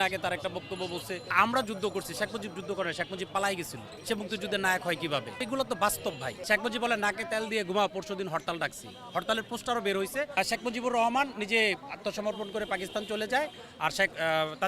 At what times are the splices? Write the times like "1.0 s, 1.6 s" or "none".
1.3 s, 3.9 s, 5.3 s, 6.3 s, 10.3 s

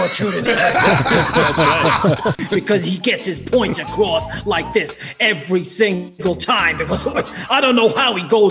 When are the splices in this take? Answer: 2.4 s

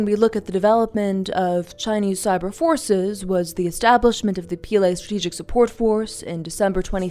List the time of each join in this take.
none

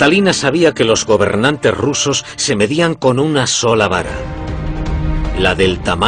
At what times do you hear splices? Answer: none

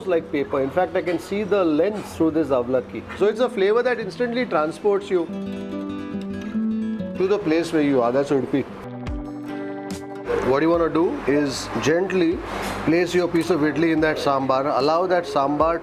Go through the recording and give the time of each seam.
2.0 s, 3.1 s, 8.7 s

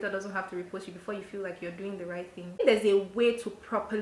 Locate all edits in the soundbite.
2.6 s

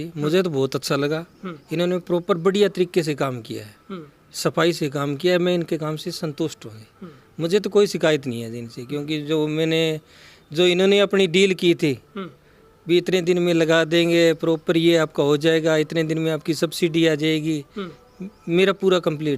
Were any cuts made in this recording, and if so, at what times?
none

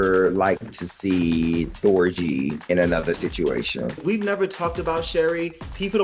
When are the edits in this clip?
2.6 s, 4.0 s

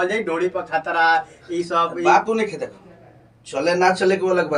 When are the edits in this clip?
none

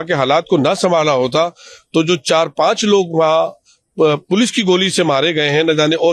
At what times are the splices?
none

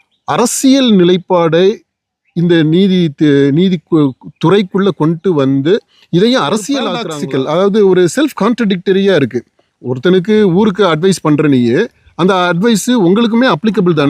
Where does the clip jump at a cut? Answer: 7.1 s

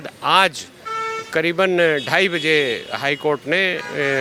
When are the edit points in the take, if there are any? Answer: none

